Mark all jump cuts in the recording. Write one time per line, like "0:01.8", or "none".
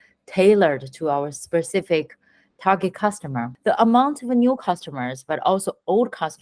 0:03.5